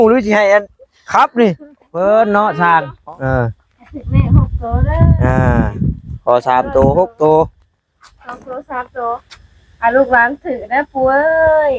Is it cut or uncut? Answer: cut